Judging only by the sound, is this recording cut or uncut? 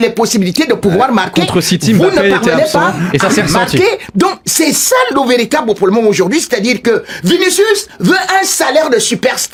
uncut